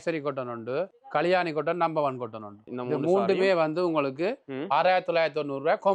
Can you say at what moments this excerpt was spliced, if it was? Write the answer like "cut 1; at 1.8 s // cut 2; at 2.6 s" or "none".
none

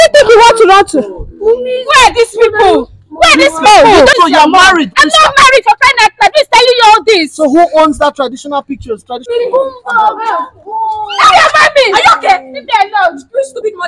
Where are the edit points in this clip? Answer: cut 1; at 4.1 s // cut 2; at 9.3 s

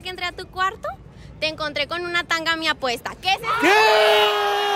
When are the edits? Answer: none

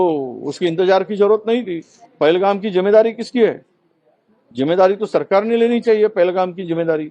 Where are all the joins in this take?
cut 1; at 2.0 s

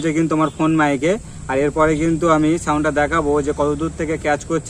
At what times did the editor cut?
none

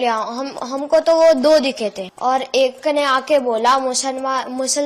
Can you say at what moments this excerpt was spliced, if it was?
cut 1; at 2.1 s

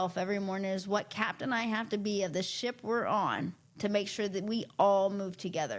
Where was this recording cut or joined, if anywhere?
none

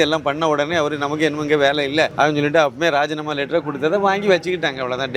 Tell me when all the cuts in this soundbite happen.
cut 1; at 2.1 s

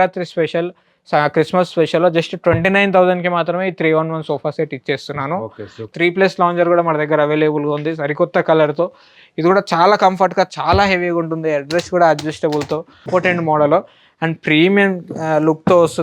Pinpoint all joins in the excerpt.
cut 1; at 5.9 s // cut 2; at 13.0 s

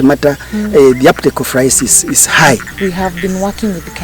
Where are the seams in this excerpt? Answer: cut 1; at 2.7 s

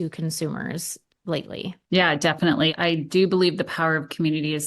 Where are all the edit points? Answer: cut 1; at 1.8 s // cut 2; at 2.7 s

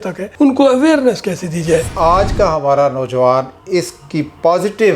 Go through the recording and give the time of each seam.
cut 1; at 1.9 s

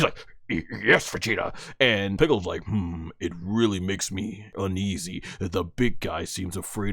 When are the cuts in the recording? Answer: cut 1; at 2.2 s // cut 2; at 4.5 s

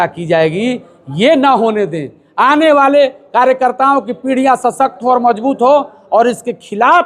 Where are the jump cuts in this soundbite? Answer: none

